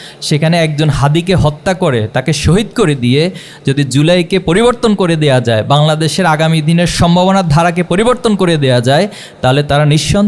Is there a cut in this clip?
no; 0 cuts

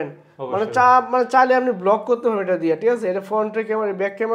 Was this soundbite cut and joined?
no; 0 cuts

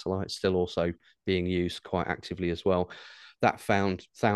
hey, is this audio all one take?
yes; 0 cuts

